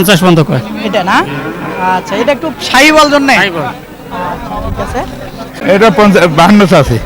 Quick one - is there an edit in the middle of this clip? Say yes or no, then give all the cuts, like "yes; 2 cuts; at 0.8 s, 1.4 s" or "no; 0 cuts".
yes; 1 cut; at 5.9 s